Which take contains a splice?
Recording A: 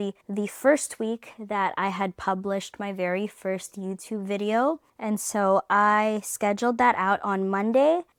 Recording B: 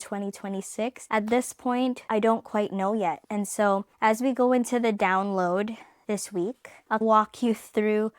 B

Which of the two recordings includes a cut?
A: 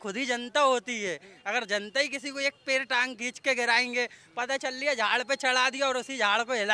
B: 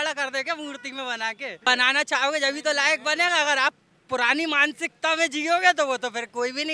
B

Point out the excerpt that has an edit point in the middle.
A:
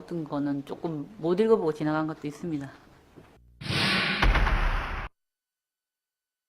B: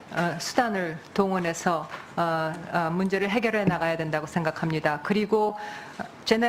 A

